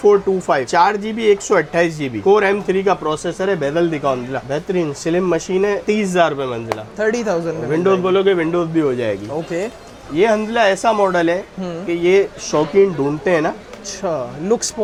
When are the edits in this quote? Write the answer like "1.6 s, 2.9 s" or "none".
none